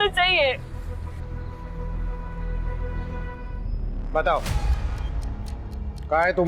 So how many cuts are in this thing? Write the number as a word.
one